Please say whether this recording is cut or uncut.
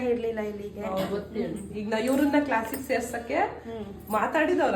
uncut